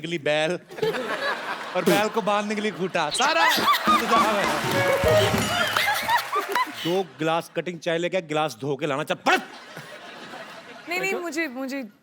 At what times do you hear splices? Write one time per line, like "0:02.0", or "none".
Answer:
0:06.8